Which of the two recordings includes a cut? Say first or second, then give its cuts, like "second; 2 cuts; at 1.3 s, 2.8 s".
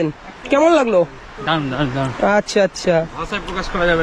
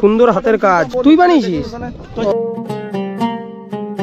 second; 1 cut; at 2.3 s